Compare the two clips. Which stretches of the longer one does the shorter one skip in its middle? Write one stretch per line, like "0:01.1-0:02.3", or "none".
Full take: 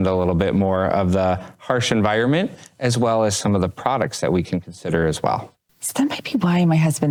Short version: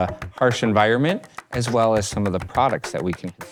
none